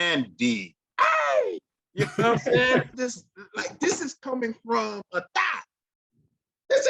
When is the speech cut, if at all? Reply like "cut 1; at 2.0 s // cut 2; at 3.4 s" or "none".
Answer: cut 1; at 2.9 s

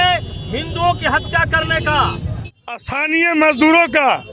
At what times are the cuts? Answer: cut 1; at 2.2 s

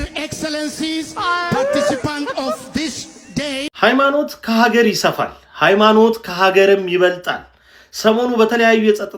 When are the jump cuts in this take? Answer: cut 1; at 3.7 s

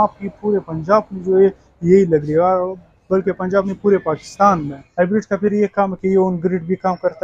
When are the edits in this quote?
cut 1; at 4.8 s

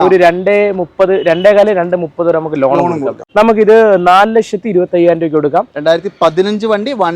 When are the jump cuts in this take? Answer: cut 1; at 3.2 s

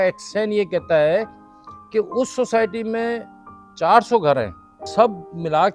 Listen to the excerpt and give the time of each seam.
cut 1; at 4.8 s

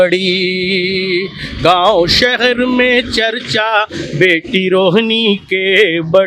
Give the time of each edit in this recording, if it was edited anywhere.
none

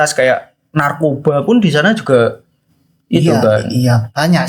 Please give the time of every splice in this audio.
none

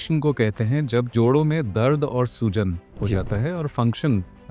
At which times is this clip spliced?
none

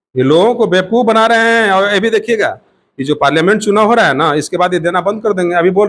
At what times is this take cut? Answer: none

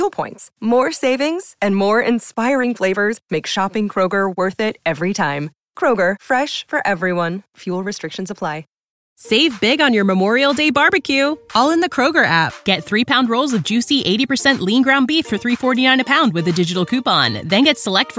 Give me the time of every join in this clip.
cut 1; at 8.8 s

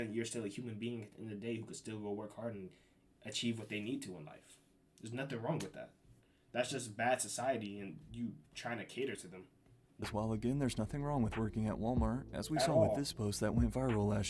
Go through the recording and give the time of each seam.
cut 1; at 10.1 s

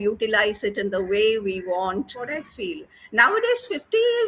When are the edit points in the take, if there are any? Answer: cut 1; at 2.2 s

